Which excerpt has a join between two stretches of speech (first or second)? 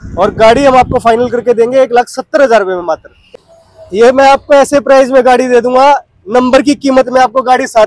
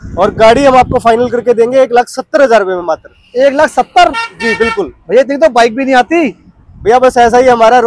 first